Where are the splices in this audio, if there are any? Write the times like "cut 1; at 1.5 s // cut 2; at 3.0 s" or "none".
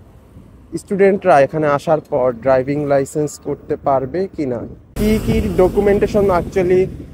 cut 1; at 4.9 s